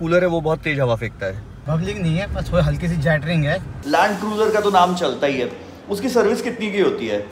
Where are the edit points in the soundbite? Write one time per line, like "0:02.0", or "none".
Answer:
0:01.5
0:03.7